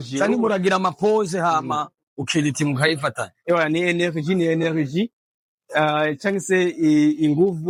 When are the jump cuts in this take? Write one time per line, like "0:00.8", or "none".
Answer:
none